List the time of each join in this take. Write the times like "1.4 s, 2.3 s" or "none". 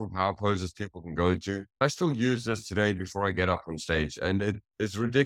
1.8 s